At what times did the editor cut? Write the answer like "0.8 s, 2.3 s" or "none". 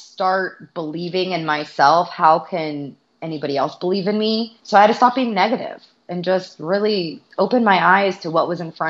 4.6 s, 7.2 s

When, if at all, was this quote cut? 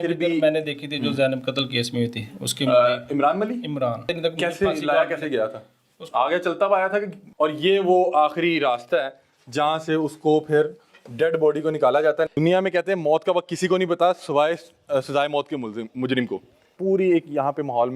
4.1 s, 7.2 s, 12.3 s, 16.7 s

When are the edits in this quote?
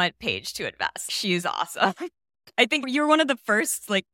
1.1 s, 2.6 s

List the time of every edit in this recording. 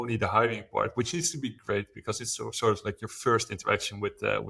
none

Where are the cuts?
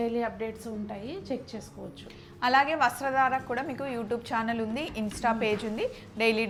none

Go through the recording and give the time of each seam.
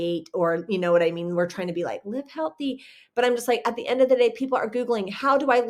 none

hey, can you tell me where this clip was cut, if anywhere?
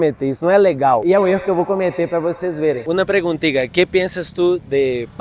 1.0 s, 2.8 s

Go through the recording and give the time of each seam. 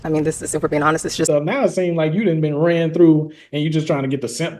1.3 s

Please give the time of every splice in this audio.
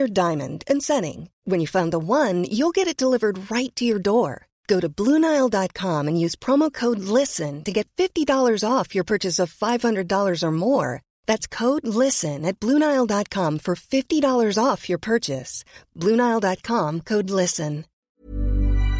18.0 s

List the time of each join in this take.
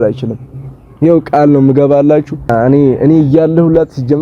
2.5 s

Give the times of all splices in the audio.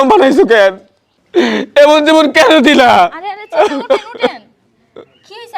none

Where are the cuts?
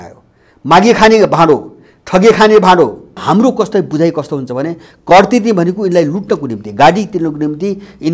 3.2 s

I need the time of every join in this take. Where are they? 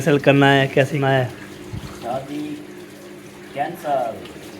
1.0 s

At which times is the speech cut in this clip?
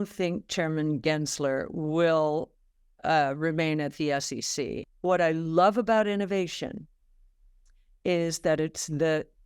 4.8 s

